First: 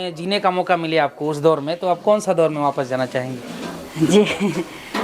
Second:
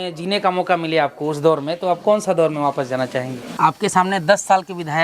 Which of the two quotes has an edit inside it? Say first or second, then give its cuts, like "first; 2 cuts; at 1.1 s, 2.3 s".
second; 1 cut; at 3.4 s